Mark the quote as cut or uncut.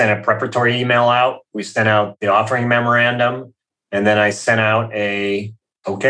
cut